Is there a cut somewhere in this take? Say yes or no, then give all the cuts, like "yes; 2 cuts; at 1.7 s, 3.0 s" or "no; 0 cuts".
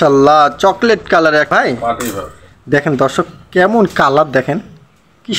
yes; 1 cut; at 1.5 s